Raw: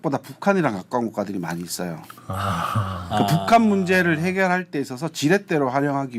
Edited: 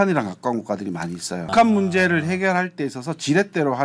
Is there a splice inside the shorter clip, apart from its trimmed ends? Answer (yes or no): yes